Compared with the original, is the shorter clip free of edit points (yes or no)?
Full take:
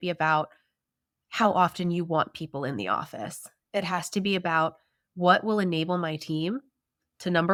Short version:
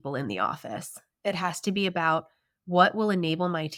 yes